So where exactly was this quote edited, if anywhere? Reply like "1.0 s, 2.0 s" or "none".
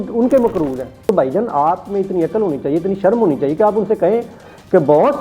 1.1 s

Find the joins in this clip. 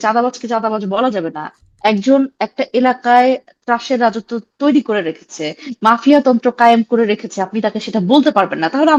none

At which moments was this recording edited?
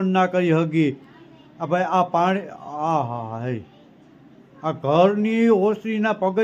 none

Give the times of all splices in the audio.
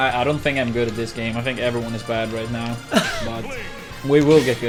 none

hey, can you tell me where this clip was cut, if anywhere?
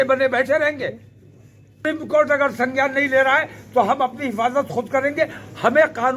1.8 s

